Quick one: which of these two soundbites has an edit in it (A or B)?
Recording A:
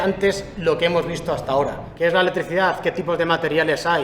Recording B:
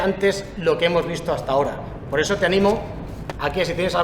A